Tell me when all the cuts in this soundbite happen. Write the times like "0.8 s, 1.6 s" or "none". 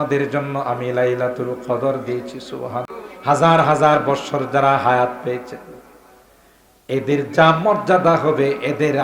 2.9 s